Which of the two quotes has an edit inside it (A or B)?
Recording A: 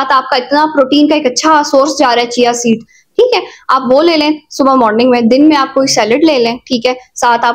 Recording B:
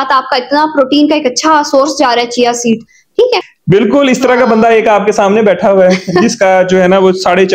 B